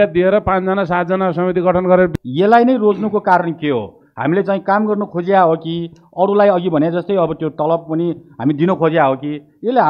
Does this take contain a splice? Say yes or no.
yes